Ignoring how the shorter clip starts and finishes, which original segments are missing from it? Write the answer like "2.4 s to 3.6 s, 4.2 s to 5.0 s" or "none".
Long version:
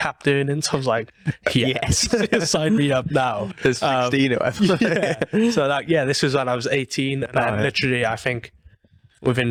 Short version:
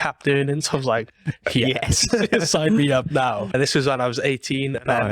3.5 s to 6.0 s